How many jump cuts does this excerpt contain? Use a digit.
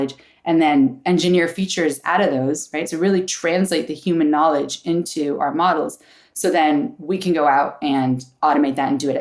0